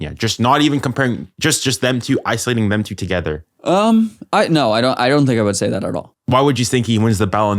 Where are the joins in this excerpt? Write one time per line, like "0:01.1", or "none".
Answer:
0:06.2